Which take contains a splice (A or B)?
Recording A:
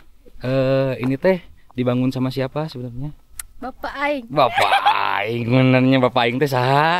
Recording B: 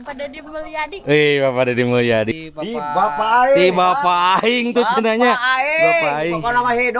B